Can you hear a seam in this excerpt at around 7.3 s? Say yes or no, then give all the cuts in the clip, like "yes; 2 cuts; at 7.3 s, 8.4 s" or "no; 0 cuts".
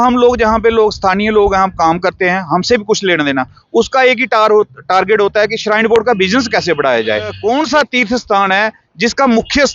yes; 1 cut; at 7.3 s